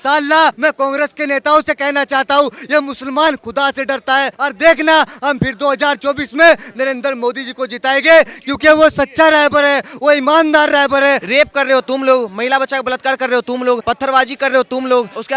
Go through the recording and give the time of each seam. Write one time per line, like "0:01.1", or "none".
0:11.3